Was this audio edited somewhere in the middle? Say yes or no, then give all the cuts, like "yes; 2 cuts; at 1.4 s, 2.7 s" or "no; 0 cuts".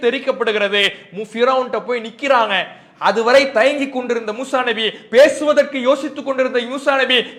no; 0 cuts